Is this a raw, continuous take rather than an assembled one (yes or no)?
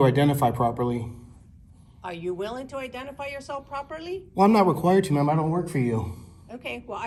yes